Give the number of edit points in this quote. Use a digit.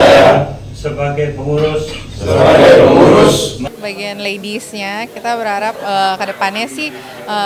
1